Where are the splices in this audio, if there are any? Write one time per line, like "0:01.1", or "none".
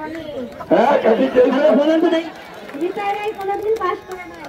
none